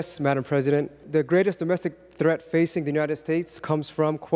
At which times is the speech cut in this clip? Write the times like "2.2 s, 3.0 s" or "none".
1.0 s